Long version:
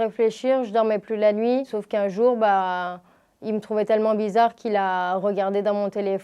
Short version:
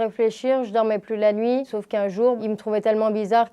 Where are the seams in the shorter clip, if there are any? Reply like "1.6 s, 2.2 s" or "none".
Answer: 2.4 s